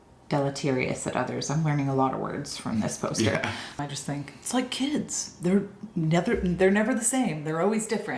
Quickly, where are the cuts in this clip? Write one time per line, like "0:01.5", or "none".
0:03.8